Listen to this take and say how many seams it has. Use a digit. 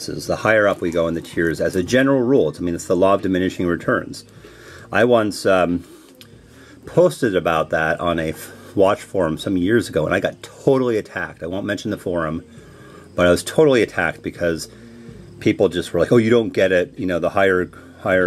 1